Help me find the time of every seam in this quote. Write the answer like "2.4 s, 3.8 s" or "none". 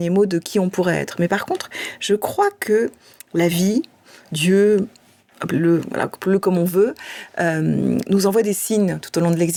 none